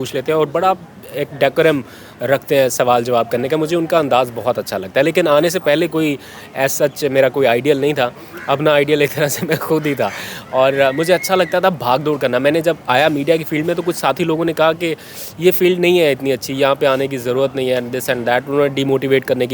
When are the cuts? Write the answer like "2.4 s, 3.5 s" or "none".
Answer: none